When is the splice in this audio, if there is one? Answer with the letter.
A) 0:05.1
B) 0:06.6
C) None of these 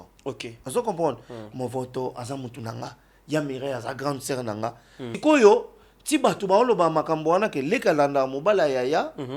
A